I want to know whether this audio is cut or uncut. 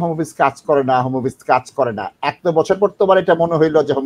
uncut